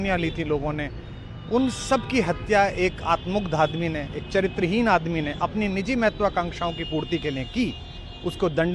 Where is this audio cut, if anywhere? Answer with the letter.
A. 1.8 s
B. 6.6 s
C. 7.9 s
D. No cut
D